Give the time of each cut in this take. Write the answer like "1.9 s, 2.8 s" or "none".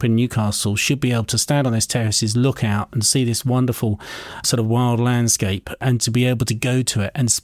4.4 s, 5.8 s